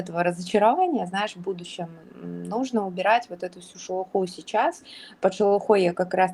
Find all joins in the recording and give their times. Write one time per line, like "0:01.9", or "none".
none

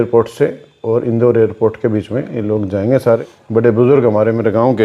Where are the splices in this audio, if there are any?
0:03.3

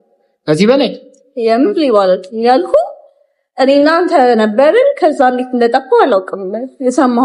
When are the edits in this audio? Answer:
none

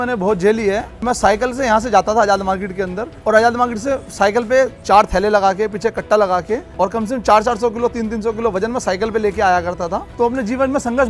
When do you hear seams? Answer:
0:01.0
0:03.1
0:04.8
0:06.7
0:10.0

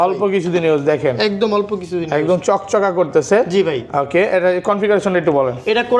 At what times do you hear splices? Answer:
none

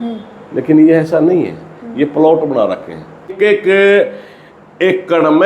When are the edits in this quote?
0:03.3

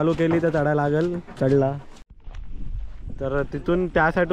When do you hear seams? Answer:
0:01.9

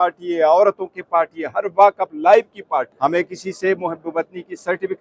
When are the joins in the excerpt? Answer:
0:02.9

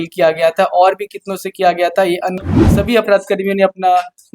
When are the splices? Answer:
0:02.4

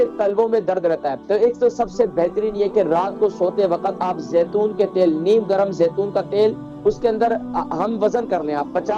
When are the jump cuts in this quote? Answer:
0:01.1

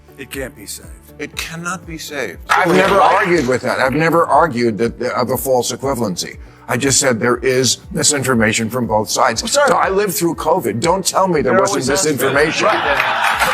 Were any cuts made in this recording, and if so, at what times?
0:02.5

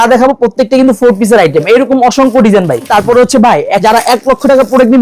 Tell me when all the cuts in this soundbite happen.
0:02.9
0:03.8

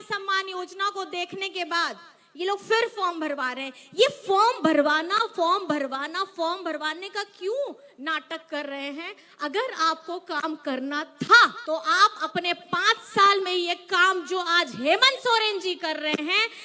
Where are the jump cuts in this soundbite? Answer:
0:11.6

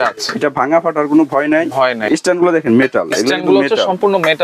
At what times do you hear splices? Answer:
0:02.1

